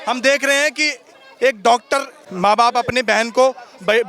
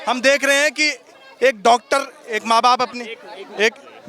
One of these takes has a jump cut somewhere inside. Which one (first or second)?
first